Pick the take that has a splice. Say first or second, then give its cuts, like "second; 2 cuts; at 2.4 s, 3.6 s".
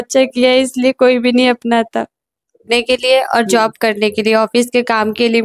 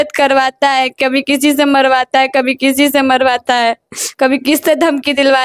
first; 1 cut; at 2.6 s